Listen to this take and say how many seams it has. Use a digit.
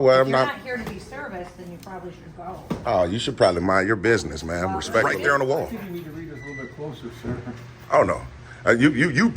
1